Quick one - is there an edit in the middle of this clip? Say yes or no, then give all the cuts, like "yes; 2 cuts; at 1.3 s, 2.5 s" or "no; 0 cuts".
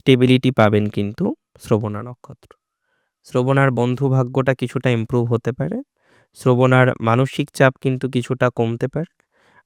no; 0 cuts